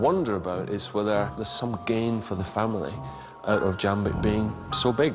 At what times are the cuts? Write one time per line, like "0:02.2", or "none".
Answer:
0:01.4

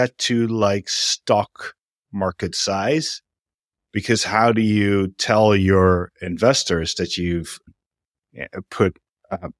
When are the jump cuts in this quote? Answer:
0:07.7

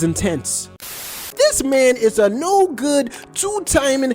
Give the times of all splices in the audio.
0:01.2

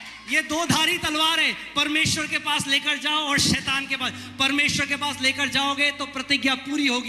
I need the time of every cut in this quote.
none

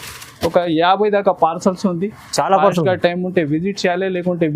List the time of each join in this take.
none

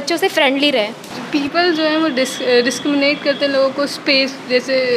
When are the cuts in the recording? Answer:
0:01.1

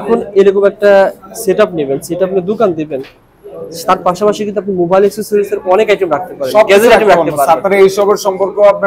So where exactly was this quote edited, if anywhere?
none

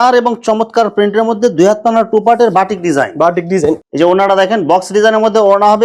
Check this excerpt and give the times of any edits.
0:03.8

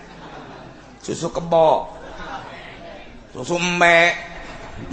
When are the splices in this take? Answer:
none

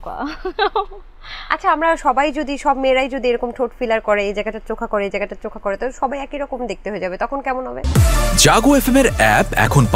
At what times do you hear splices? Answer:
0:07.8

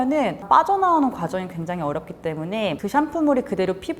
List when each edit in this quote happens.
0:02.8

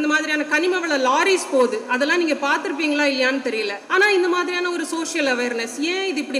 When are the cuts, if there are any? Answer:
0:03.8

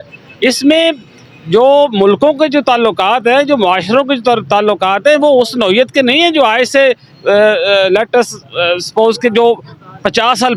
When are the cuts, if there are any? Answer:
none

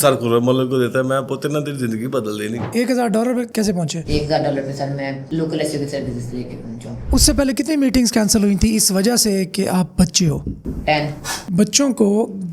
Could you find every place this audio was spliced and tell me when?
0:02.7
0:07.0
0:11.3

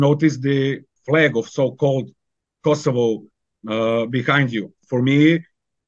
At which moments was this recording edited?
0:00.9
0:04.8

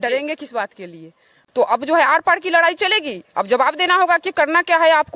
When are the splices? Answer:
0:01.4

